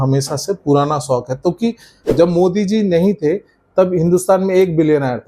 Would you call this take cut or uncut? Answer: cut